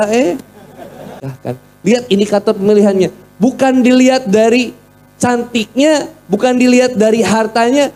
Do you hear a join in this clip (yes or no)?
yes